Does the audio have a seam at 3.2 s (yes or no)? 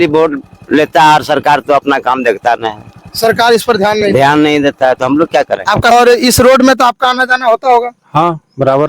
no